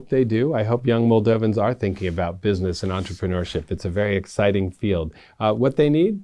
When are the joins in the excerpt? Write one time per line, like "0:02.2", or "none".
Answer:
none